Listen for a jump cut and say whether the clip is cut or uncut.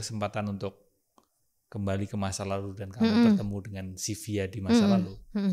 uncut